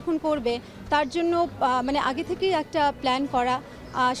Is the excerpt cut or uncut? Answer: uncut